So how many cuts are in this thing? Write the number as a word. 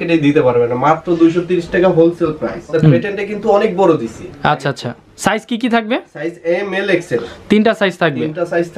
one